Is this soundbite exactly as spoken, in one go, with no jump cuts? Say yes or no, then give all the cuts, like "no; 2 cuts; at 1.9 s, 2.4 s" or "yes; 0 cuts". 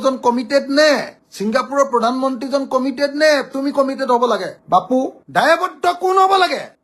no; 1 cut; at 5.2 s